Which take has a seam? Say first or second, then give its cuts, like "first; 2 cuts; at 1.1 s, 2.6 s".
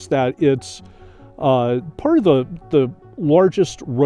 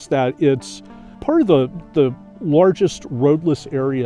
second; 1 cut; at 1.1 s